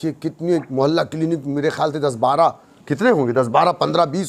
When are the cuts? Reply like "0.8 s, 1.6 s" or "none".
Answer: none

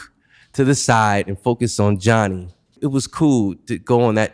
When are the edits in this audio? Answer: 2.8 s

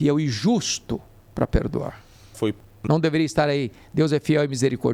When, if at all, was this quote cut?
none

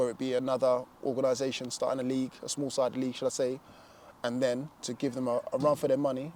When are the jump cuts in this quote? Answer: none

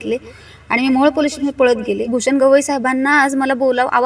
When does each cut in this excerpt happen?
2.1 s

